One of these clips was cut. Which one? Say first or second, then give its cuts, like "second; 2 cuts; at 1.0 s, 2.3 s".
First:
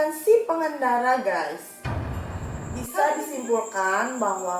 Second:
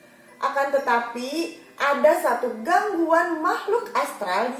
first; 1 cut; at 2.8 s